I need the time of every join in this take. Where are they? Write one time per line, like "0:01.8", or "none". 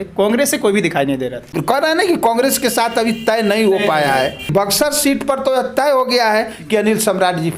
0:01.5
0:04.5